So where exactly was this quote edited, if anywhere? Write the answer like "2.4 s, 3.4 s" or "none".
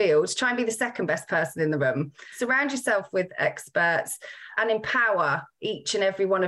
2.4 s, 4.5 s